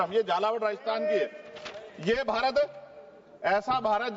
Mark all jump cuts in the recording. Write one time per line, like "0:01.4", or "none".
none